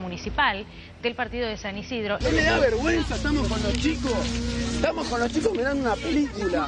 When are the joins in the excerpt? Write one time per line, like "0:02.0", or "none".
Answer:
0:02.2